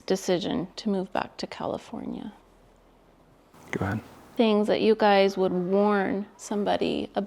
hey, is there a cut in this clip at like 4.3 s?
yes; 1 cut; at 4.3 s

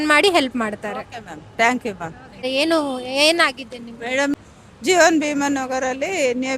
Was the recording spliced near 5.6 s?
no; 2 cuts; at 2.4 s, 4.3 s

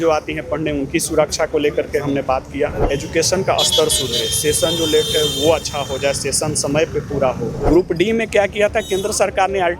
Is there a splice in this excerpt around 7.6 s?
yes; 2 cuts; at 2.8 s, 7.6 s

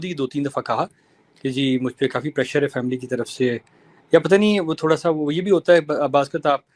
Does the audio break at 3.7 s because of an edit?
no; 0 cuts

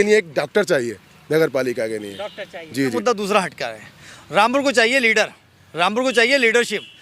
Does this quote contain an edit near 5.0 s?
no; 1 cut; at 3.0 s

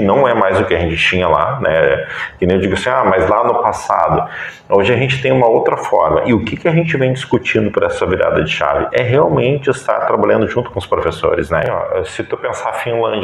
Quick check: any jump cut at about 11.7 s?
yes; 1 cut; at 11.7 s

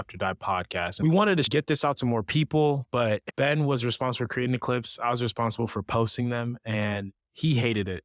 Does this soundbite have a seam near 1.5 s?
yes; 3 cuts; at 0.9 s, 1.5 s, 3.3 s

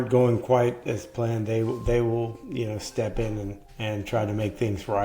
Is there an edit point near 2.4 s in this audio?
no; 1 cut; at 3.6 s

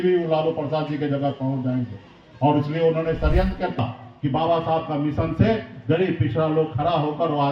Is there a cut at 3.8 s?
yes; 1 cut; at 3.8 s

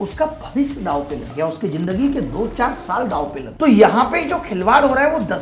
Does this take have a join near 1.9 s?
no; 1 cut; at 3.4 s

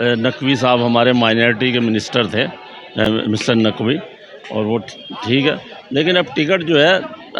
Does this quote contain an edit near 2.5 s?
no; 0 cuts

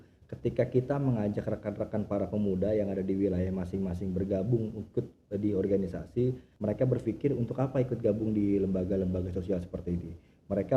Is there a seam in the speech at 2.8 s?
no; 1 cut; at 6.5 s

